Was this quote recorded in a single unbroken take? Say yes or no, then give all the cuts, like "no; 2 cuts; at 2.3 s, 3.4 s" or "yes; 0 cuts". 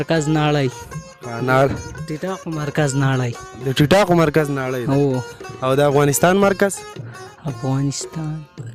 yes; 0 cuts